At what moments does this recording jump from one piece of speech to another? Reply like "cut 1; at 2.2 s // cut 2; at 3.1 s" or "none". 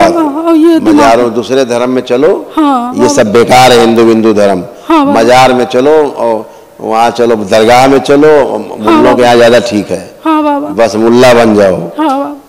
none